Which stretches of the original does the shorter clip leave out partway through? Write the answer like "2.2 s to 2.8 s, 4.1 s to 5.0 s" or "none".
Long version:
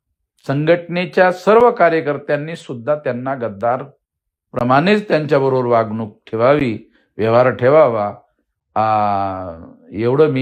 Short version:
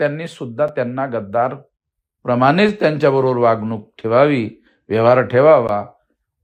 none